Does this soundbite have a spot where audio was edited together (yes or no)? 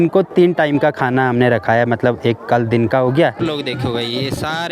yes